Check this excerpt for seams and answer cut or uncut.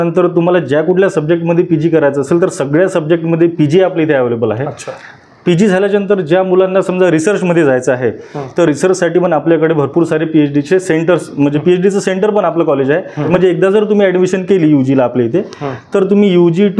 cut